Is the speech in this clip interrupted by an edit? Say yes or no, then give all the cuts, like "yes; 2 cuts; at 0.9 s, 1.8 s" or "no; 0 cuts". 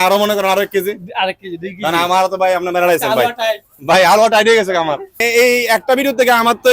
yes; 1 cut; at 5.2 s